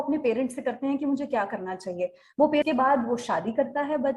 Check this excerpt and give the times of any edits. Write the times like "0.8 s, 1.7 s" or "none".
2.6 s